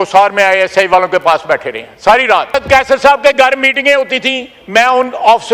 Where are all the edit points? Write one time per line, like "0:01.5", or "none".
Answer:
0:02.6